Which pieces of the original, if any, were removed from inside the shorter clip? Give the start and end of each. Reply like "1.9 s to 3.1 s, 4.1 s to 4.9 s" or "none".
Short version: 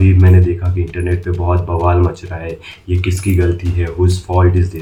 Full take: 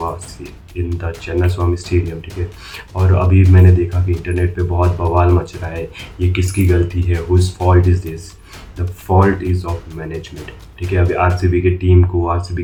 none